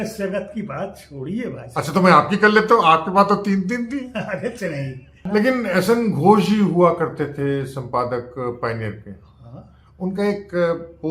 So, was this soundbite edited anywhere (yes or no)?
yes